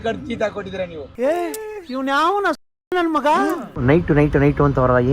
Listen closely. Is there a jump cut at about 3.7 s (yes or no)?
yes